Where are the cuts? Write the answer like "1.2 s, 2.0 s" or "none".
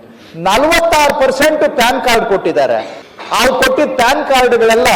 3.0 s